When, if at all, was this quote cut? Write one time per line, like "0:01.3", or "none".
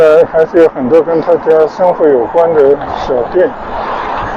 none